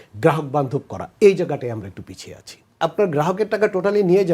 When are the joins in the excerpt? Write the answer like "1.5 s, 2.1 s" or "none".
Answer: 2.8 s

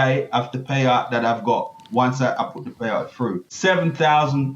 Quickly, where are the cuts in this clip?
3.5 s

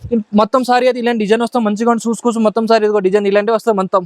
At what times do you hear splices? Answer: none

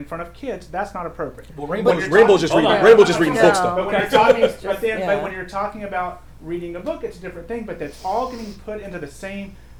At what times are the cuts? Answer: none

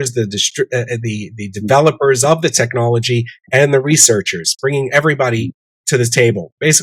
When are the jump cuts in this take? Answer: none

